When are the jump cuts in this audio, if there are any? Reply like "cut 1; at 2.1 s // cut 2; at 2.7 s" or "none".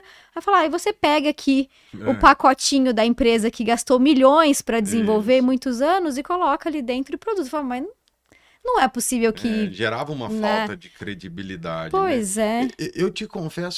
none